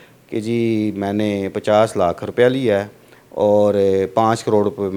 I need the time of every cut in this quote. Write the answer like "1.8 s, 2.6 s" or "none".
none